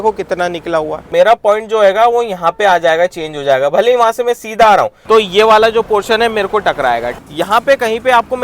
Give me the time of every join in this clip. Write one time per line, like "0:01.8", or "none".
0:01.1
0:05.0
0:07.2

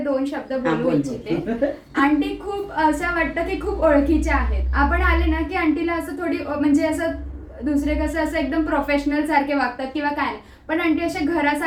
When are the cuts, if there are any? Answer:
none

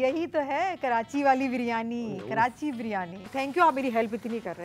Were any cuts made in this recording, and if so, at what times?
0:03.2

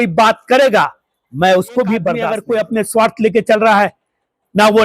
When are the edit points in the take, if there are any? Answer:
0:02.4

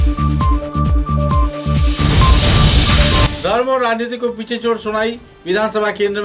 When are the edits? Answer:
0:03.3

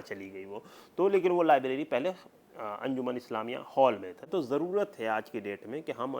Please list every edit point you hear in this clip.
0:04.1

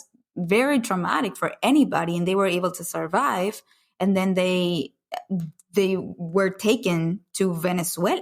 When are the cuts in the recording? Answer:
none

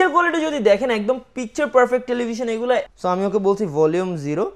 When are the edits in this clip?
0:02.9

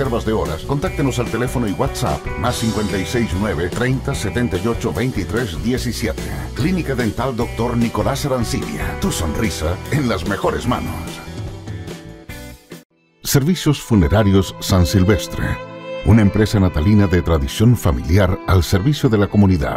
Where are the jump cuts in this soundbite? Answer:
0:12.9

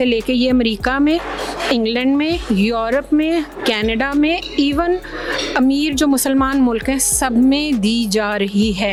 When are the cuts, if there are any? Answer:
none

